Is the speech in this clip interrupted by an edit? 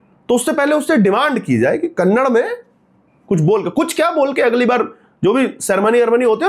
no; 0 cuts

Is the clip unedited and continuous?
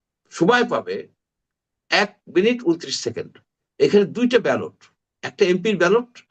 yes; 0 cuts

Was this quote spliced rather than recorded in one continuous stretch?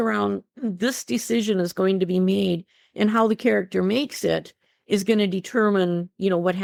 no; 0 cuts

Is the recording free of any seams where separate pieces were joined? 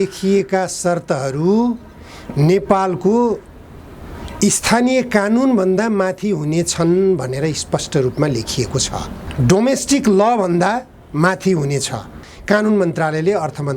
no; 2 cuts; at 9.2 s, 12.3 s

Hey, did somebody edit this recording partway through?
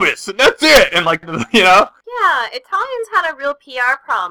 yes; 2 cuts; at 1.2 s, 2.0 s

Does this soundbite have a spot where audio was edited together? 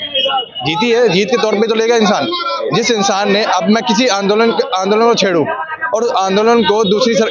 no; 0 cuts

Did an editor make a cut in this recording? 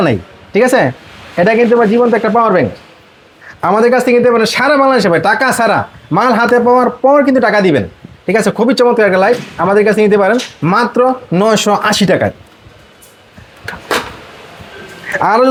no; 0 cuts

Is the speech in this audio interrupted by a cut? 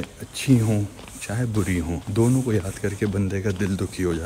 yes; 1 cut; at 2.0 s

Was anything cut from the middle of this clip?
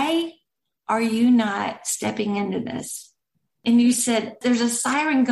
yes; 1 cut; at 4.4 s

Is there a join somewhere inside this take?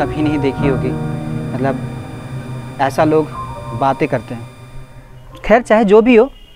no; 0 cuts

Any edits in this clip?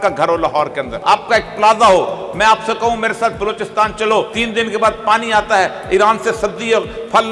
yes; 2 cuts; at 0.9 s, 4.4 s

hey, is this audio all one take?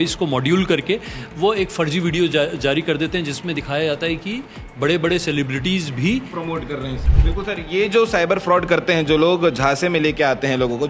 no; 1 cut; at 7.0 s

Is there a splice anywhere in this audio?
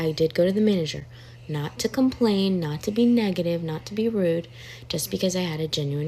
no; 0 cuts

